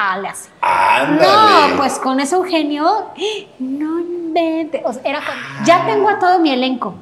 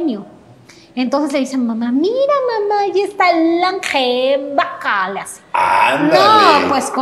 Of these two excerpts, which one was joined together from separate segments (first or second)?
first